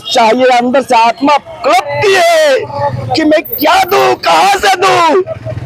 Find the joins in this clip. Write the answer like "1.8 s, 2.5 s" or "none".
none